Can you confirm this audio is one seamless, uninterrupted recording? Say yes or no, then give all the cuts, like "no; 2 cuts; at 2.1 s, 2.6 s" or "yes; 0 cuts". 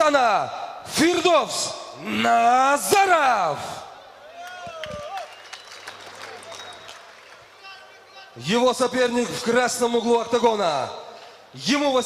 no; 1 cut; at 1.9 s